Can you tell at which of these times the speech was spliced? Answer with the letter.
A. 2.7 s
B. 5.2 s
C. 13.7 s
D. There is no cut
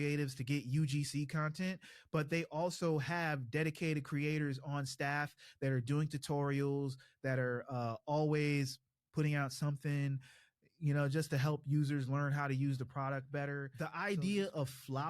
C